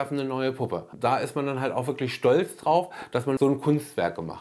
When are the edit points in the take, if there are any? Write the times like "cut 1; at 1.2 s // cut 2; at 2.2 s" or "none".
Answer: cut 1; at 0.9 s // cut 2; at 3.4 s